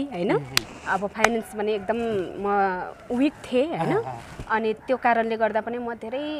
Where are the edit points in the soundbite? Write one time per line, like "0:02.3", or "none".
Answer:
none